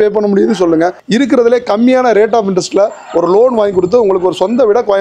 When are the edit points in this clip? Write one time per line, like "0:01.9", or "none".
0:01.0